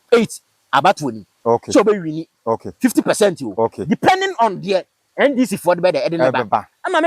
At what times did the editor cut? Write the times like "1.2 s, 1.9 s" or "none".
none